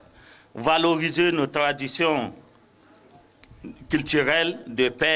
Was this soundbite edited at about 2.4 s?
no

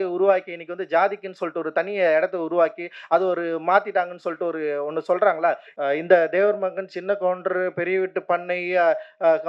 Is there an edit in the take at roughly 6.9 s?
no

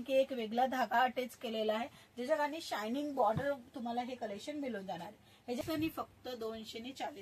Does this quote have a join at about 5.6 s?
yes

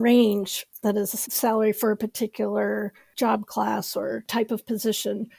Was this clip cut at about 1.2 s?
yes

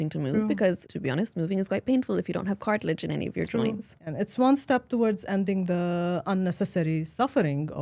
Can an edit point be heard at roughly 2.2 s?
no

